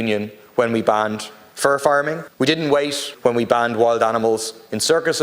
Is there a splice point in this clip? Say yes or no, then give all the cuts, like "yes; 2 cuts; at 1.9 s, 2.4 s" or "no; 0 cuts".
yes; 2 cuts; at 2.2 s, 3.1 s